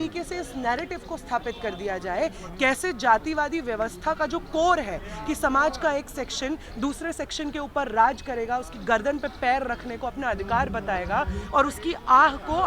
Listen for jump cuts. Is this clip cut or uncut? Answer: uncut